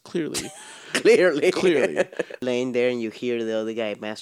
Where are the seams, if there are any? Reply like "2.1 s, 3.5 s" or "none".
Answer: 2.4 s

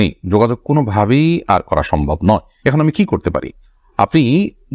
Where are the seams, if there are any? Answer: none

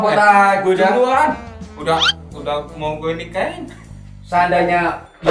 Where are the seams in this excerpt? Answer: none

